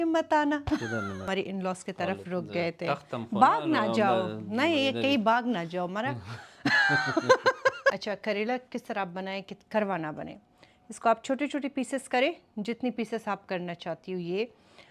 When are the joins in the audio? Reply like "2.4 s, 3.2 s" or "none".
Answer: 1.3 s, 8.0 s